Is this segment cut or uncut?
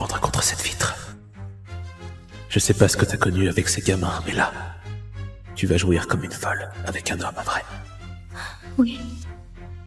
uncut